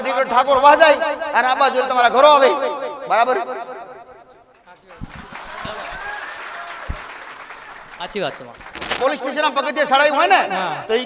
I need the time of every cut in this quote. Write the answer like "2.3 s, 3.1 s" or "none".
9.0 s

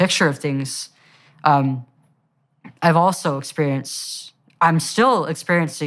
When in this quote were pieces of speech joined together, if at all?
none

